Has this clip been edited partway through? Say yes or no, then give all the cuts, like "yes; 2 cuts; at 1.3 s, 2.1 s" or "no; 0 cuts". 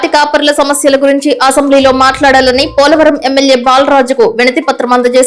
no; 0 cuts